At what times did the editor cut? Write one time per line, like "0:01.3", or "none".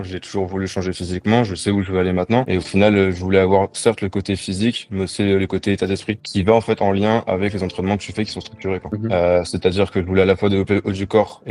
0:02.5
0:06.3
0:08.9